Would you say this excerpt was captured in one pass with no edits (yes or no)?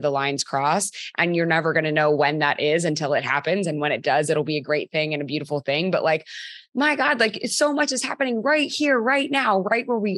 yes